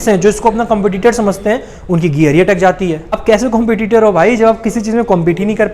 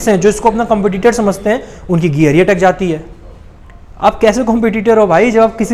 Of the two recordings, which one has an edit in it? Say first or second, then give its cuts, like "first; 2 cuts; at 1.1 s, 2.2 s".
first; 1 cut; at 3.2 s